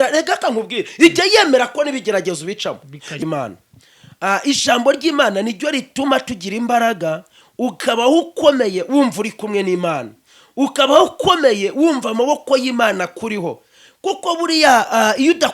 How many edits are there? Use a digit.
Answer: 1